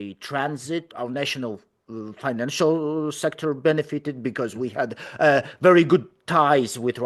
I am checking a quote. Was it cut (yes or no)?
yes